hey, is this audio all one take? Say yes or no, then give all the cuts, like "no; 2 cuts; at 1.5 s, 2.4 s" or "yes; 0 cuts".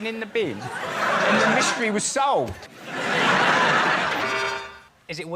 no; 1 cut; at 4.1 s